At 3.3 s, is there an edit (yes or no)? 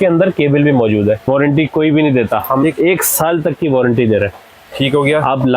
no